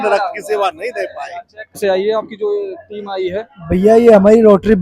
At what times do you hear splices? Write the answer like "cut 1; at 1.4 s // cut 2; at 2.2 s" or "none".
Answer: cut 1; at 1.8 s

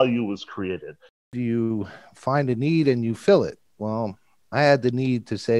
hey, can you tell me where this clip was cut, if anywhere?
cut 1; at 1.2 s

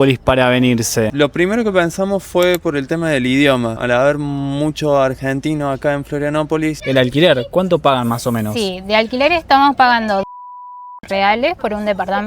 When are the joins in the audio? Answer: cut 1; at 1.1 s // cut 2; at 3.8 s // cut 3; at 6.8 s

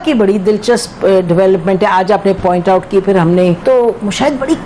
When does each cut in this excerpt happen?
cut 1; at 3.6 s

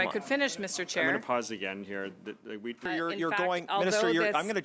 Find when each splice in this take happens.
cut 1; at 2.8 s

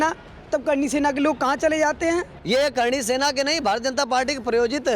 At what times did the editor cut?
cut 1; at 2.3 s

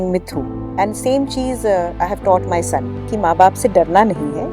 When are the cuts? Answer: cut 1; at 3.1 s

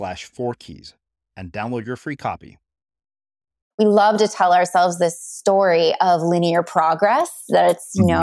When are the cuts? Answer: cut 1; at 3.6 s

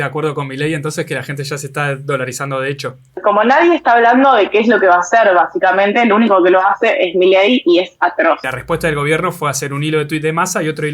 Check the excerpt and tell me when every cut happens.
cut 1; at 3.2 s // cut 2; at 8.5 s

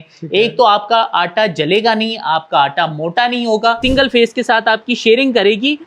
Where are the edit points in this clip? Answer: cut 1; at 3.8 s

